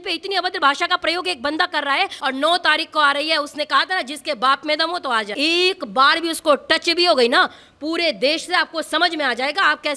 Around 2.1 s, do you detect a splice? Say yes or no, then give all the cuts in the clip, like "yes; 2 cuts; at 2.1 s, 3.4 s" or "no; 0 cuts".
yes; 2 cuts; at 2.1 s, 5.3 s